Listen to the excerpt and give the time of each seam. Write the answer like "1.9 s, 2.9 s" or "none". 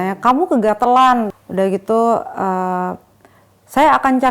1.4 s